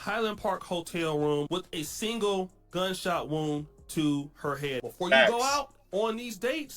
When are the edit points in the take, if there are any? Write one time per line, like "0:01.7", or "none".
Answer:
0:01.5
0:04.8